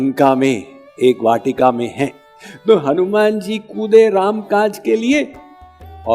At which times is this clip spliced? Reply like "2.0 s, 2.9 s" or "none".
2.2 s